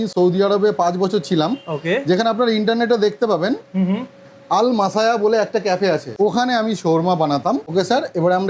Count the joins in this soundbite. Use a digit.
0